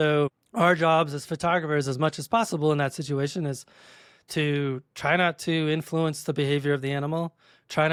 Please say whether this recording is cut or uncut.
uncut